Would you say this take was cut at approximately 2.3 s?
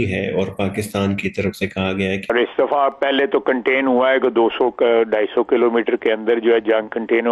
yes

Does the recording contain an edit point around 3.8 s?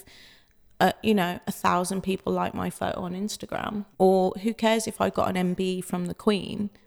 yes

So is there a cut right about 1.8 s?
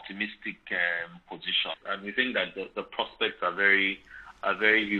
yes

